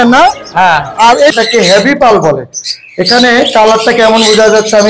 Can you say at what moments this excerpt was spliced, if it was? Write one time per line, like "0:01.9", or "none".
0:01.3